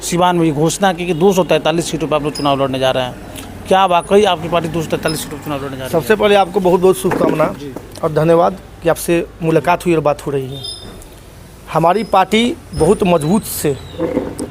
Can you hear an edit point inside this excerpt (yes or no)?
no